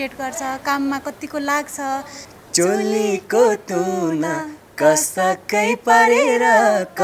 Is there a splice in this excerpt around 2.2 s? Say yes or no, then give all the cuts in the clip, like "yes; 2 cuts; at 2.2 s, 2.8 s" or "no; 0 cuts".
yes; 1 cut; at 2.2 s